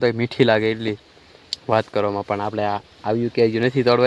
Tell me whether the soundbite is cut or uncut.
uncut